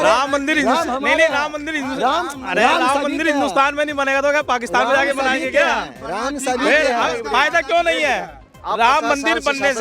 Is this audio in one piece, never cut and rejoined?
yes; 0 cuts

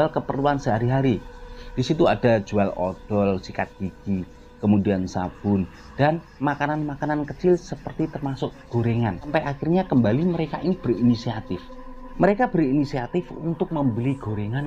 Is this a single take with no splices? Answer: yes; 0 cuts

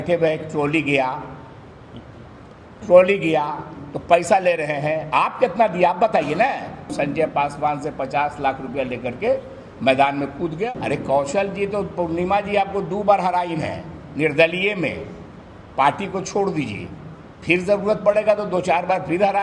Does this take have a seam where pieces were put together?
yes; 2 cuts; at 6.9 s, 10.7 s

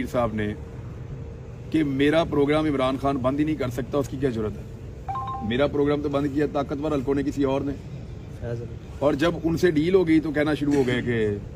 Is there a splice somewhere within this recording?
no; 0 cuts

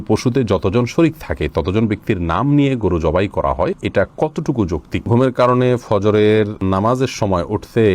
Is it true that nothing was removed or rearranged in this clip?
no; 3 cuts; at 3.8 s, 5.1 s, 6.6 s

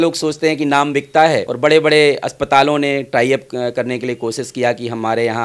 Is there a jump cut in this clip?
no; 0 cuts

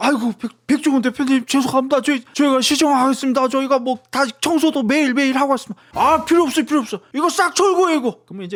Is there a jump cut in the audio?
no; 0 cuts

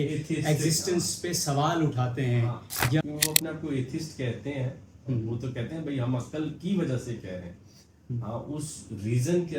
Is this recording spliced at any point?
no; 0 cuts

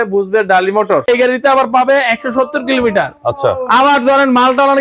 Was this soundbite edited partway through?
yes; 1 cut; at 1.0 s

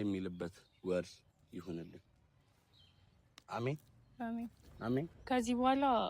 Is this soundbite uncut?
no; 1 cut; at 5.2 s

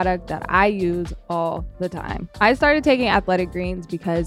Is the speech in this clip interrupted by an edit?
yes; 1 cut; at 2.2 s

